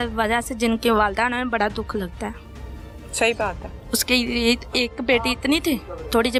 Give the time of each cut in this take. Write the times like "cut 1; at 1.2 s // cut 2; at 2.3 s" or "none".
none